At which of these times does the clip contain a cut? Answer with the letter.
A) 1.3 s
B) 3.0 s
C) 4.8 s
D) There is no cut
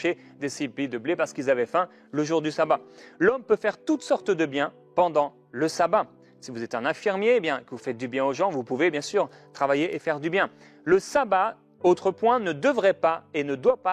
B